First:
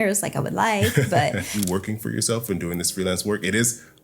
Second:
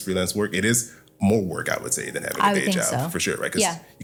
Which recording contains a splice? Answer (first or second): first